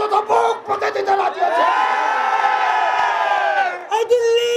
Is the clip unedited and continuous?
yes; 0 cuts

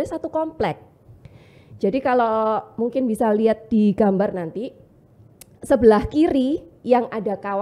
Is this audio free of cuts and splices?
yes; 0 cuts

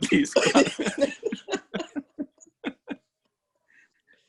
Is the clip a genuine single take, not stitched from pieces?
yes; 0 cuts

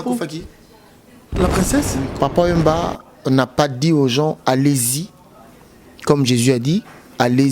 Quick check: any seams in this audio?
yes; 1 cut; at 2.0 s

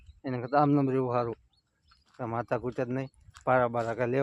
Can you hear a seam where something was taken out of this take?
yes; 1 cut; at 2.0 s

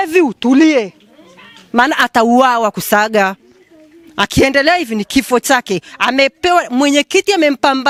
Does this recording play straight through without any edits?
yes; 0 cuts

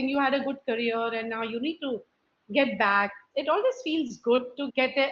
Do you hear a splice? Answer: yes; 1 cut; at 3.2 s

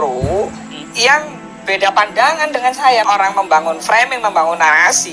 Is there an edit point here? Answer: yes; 1 cut; at 3.1 s

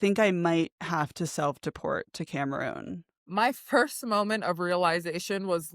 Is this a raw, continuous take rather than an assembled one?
no; 1 cut; at 3.0 s

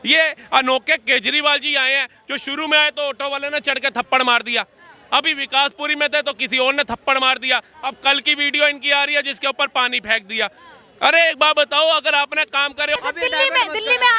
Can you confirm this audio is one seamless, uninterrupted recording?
no; 1 cut; at 13.0 s

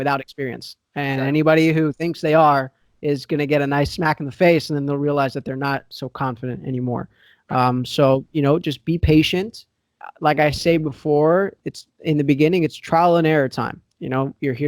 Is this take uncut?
yes; 0 cuts

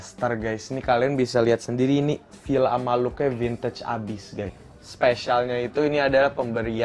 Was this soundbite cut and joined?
yes; 1 cut; at 4.6 s

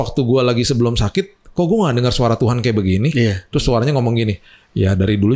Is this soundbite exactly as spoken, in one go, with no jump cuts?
yes; 0 cuts

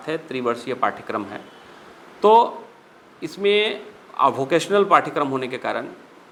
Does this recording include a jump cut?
no; 0 cuts

